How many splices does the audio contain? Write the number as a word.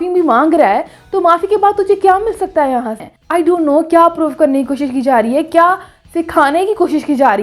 one